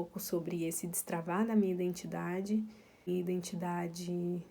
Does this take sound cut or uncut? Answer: cut